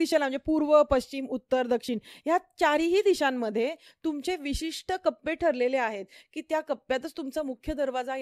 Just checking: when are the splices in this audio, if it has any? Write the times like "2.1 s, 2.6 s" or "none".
none

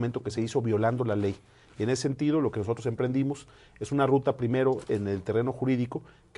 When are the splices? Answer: 2.8 s

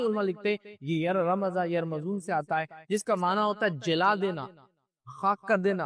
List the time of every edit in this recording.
none

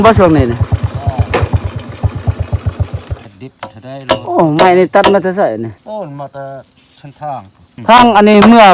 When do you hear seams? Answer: 3.3 s, 5.8 s, 7.7 s

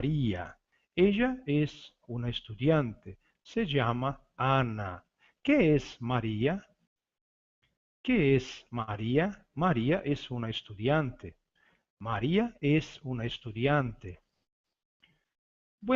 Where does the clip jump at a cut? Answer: 9.9 s

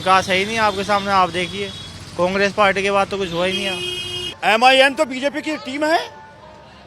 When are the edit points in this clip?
4.3 s

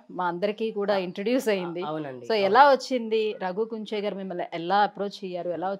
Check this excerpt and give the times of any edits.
none

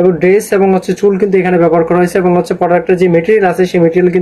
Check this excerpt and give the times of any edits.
none

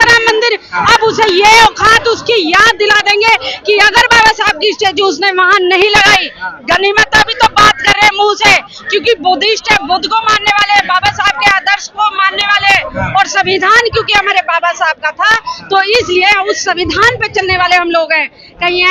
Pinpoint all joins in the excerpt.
none

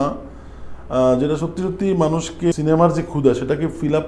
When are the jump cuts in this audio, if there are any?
2.5 s

